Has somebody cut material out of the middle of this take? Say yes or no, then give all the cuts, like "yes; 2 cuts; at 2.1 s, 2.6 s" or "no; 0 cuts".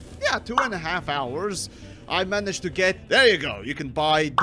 yes; 1 cut; at 3.0 s